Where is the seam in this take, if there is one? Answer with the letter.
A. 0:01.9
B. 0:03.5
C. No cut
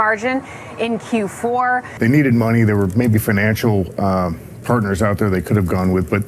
A